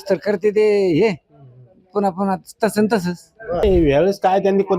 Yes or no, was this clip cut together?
yes